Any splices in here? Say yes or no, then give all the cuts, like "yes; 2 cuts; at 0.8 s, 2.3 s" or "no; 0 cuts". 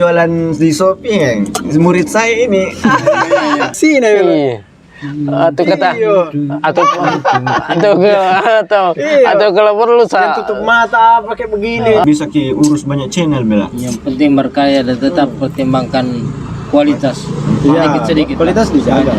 yes; 2 cuts; at 3.7 s, 12.0 s